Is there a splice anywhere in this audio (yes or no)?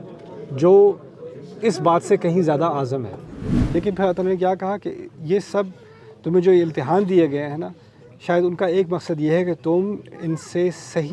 yes